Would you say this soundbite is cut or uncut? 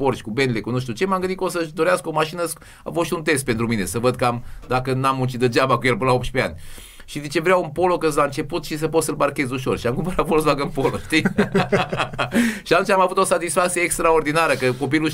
uncut